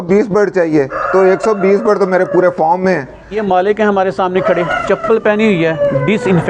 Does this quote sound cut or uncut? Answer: cut